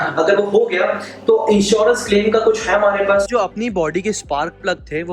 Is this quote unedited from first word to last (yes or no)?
no